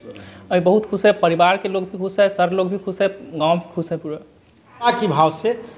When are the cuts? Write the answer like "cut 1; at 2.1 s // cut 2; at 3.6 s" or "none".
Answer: cut 1; at 4.9 s